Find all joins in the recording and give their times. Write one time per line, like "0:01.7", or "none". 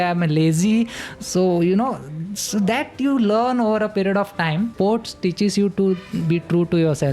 0:04.7